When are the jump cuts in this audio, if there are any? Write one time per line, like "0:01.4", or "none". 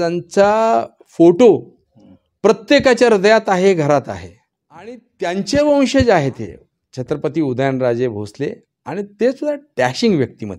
0:05.1

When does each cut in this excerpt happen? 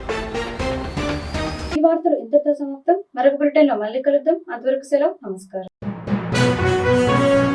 none

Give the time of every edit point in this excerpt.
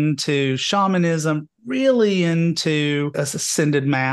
0:03.2

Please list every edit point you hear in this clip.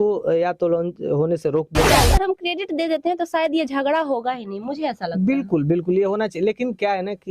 0:02.1

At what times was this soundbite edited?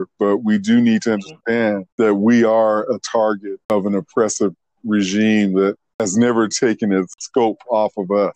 0:01.8
0:03.7
0:05.9
0:07.2

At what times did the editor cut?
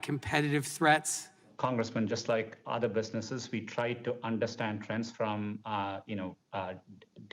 0:01.5

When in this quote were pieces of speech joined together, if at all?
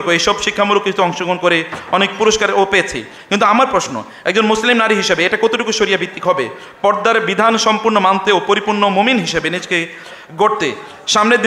none

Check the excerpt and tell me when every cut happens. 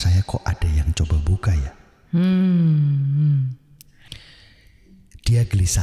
0:03.5

